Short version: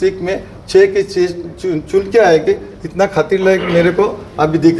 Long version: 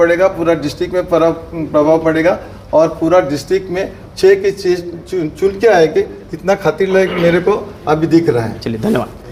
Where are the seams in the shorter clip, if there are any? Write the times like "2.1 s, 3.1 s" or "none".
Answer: none